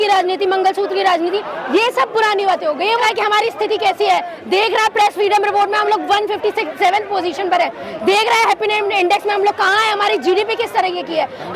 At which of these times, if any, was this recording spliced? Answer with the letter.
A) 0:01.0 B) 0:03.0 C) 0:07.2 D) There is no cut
B